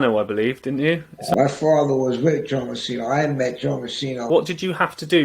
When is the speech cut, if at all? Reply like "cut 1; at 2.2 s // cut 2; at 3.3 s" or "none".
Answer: cut 1; at 1.2 s // cut 2; at 4.3 s